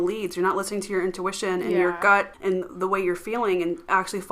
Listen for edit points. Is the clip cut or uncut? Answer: cut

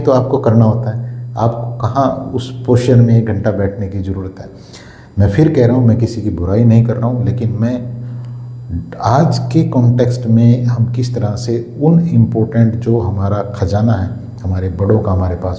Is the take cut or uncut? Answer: uncut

